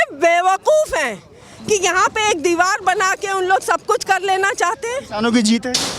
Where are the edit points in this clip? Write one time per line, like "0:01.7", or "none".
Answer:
0:05.0